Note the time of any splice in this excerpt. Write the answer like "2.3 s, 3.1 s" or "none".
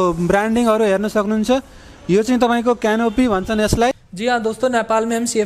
4.1 s